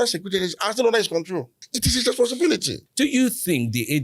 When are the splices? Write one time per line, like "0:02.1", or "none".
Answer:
0:01.7
0:02.8